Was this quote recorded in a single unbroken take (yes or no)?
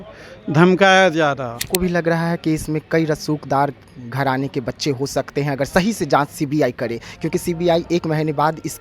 no